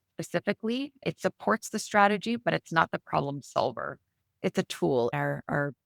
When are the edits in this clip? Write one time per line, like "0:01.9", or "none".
0:04.4